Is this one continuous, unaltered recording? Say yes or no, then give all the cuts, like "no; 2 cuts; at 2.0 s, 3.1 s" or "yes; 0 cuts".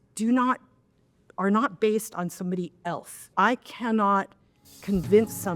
no; 1 cut; at 3.3 s